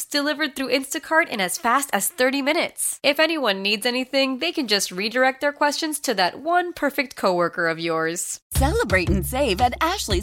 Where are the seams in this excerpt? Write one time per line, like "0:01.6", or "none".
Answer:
0:08.3